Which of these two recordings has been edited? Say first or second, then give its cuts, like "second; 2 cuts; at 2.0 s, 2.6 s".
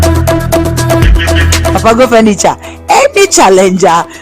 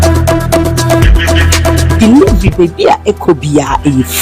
first; 1 cut; at 1.7 s